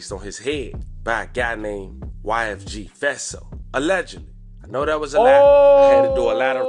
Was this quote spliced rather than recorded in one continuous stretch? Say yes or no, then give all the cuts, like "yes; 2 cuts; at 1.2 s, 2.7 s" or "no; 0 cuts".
no; 0 cuts